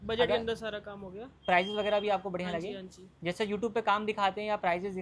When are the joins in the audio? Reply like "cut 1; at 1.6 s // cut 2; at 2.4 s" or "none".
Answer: none

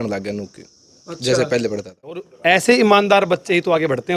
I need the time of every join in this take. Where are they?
cut 1; at 2.2 s

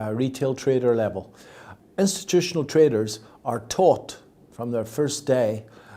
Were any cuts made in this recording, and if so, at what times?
none

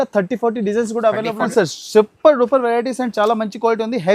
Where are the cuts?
cut 1; at 1.4 s

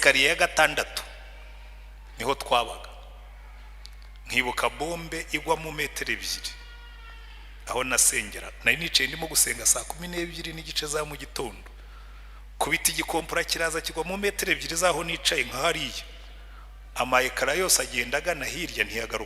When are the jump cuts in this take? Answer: none

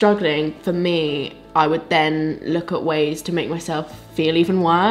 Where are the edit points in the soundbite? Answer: none

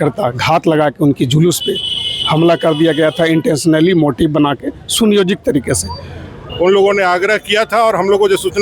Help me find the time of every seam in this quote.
cut 1; at 6.4 s

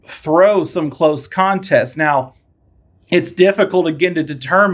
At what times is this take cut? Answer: none

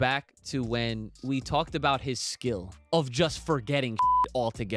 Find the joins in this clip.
cut 1; at 1.2 s // cut 2; at 2.7 s

